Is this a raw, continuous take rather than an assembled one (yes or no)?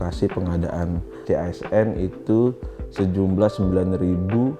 no